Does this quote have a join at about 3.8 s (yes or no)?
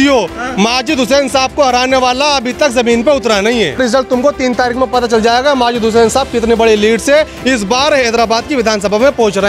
yes